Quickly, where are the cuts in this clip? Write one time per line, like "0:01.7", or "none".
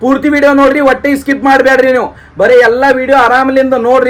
none

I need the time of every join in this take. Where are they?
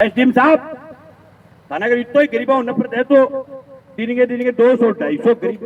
none

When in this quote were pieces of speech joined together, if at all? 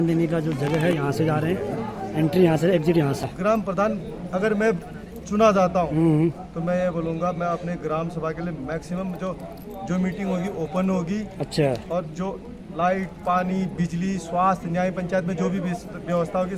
0:03.2

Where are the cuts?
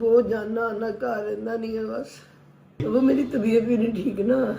0:02.9

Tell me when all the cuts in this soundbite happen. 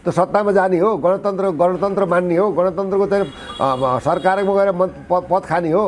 none

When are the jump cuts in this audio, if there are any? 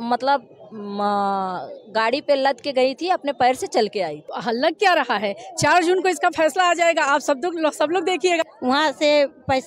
0:04.3
0:08.4

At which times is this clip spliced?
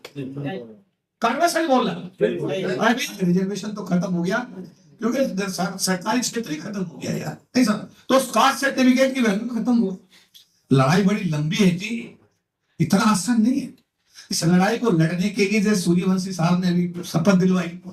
0:03.2

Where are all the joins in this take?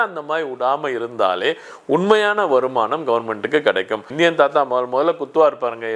0:04.1

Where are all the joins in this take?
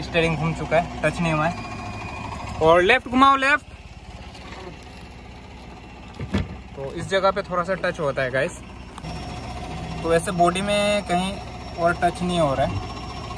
0:09.1

